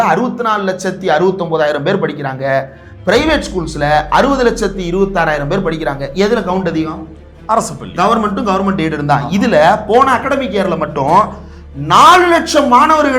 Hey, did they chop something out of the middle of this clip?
no; 0 cuts

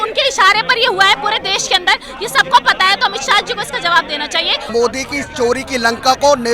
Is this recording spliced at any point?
yes; 1 cut; at 4.7 s

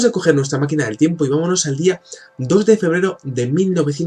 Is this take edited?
yes; 1 cut; at 2.1 s

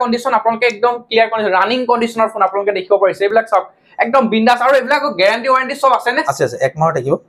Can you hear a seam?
no; 0 cuts

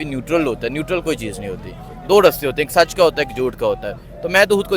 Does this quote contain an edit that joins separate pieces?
no; 0 cuts

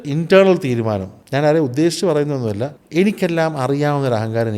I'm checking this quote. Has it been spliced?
yes; 2 cuts; at 1.2 s, 2.7 s

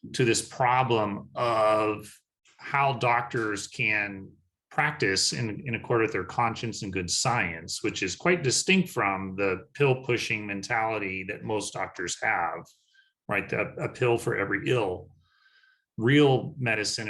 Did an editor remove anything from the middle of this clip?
no; 0 cuts

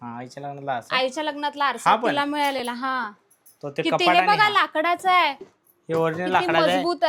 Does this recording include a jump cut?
no; 0 cuts

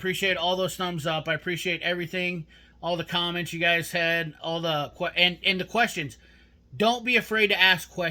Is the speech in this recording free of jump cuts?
yes; 0 cuts

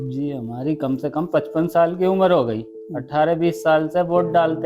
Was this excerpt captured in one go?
yes; 0 cuts

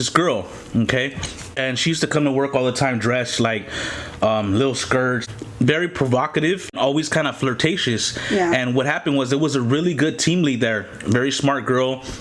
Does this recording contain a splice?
yes; 3 cuts; at 1.6 s, 5.2 s, 6.7 s

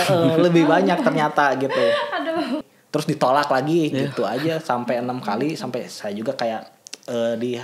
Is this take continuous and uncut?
no; 1 cut; at 2.7 s

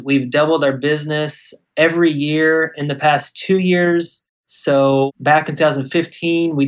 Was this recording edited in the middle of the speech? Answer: yes; 1 cut; at 5.1 s

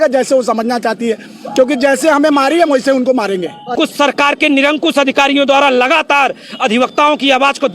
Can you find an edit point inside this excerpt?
yes; 1 cut; at 3.7 s

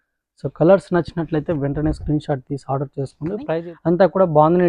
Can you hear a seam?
yes; 1 cut; at 3.5 s

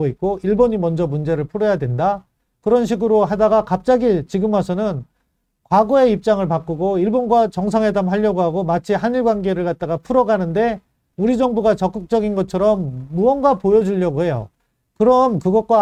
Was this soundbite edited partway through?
no; 0 cuts

